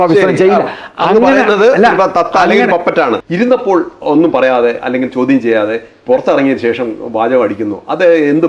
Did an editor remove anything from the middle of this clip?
yes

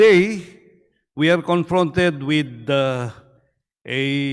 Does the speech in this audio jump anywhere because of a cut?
no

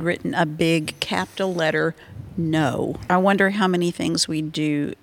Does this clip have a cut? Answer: yes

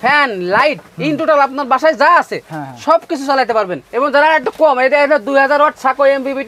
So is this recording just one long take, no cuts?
yes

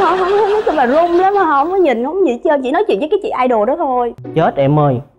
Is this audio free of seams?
no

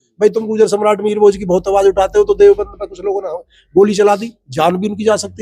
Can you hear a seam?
no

